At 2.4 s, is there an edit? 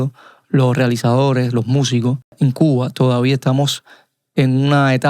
yes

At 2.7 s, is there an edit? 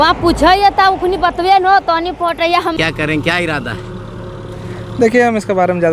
yes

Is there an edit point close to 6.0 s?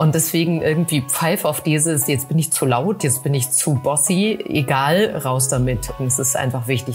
yes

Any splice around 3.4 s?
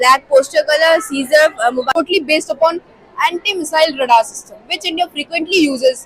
no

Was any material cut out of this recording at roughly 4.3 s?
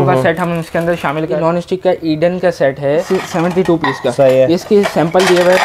no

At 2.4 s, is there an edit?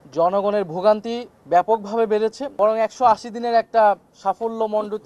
yes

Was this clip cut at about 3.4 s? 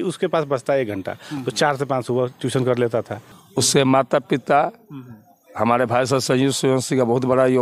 yes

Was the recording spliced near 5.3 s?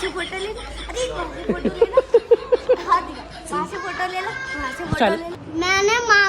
yes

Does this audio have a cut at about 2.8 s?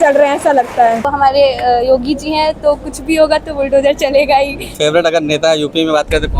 no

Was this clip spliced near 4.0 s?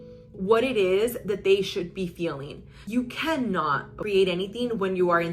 yes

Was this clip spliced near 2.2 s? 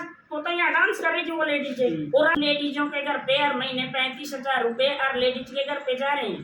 yes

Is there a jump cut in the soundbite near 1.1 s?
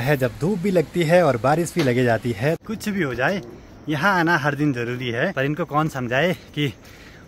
no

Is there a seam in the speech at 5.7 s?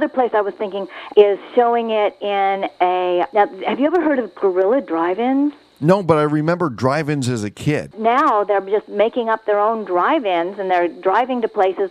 yes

